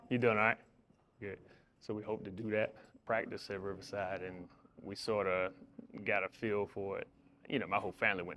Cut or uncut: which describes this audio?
cut